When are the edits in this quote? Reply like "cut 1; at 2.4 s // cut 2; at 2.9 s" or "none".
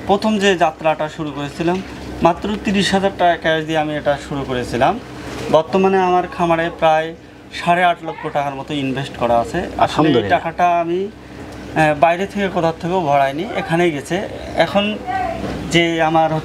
none